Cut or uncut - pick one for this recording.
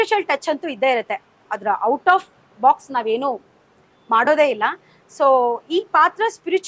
uncut